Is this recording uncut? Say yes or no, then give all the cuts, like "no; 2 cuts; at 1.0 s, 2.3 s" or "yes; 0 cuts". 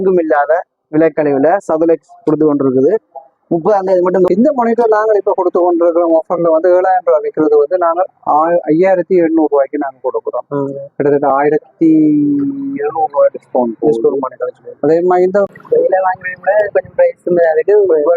no; 2 cuts; at 4.3 s, 15.5 s